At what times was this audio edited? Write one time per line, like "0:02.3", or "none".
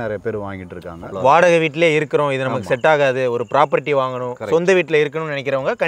0:01.0